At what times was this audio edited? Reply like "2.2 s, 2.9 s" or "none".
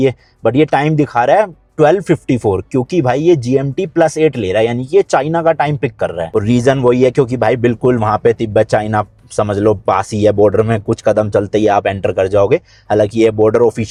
none